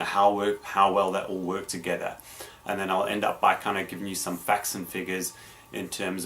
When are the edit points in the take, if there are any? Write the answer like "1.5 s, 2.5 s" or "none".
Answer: 4.2 s